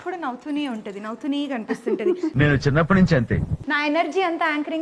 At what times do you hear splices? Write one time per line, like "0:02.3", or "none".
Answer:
none